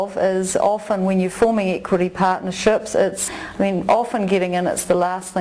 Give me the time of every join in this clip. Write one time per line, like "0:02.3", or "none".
0:03.3